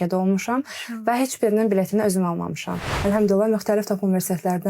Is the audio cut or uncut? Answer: cut